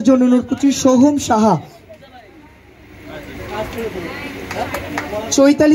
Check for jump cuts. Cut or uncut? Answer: uncut